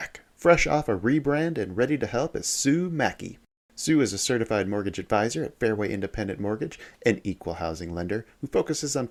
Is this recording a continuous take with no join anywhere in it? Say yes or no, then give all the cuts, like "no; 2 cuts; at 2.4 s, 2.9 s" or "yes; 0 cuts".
yes; 0 cuts